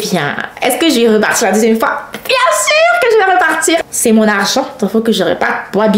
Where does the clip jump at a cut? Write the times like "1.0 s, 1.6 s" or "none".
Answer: 3.9 s